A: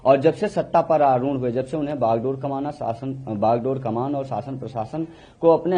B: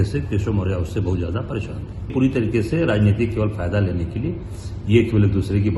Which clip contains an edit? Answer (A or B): B